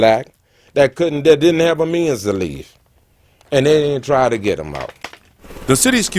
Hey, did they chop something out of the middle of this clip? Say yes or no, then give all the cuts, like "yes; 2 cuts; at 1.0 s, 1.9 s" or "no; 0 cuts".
no; 0 cuts